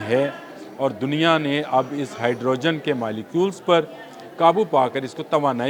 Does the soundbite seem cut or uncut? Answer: uncut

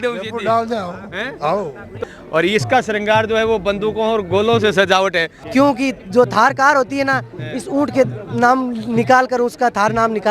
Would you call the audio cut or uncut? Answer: cut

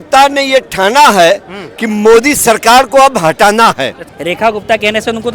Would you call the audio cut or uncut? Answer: cut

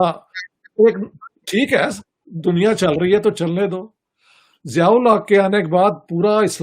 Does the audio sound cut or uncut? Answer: uncut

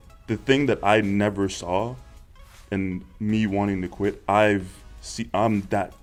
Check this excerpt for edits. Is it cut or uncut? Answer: uncut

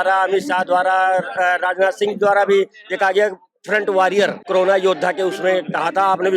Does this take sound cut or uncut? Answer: cut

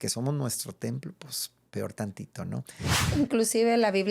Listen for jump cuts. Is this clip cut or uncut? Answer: cut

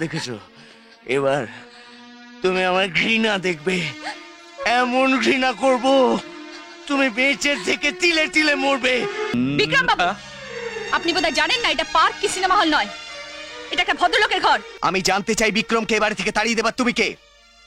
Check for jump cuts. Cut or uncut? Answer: cut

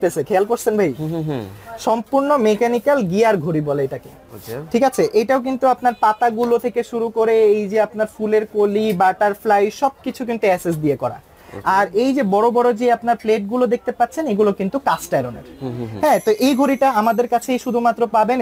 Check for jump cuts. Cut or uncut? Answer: uncut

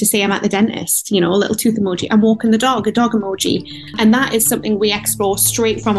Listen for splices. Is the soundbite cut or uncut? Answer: cut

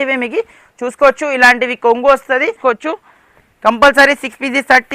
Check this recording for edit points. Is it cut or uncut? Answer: cut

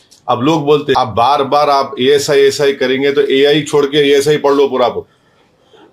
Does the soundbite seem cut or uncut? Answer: cut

